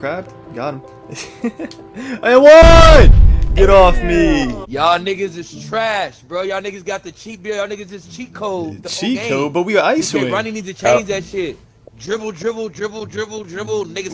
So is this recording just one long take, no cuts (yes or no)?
no